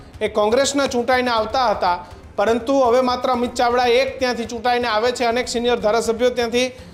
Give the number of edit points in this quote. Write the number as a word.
zero